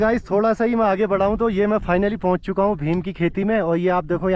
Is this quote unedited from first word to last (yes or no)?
yes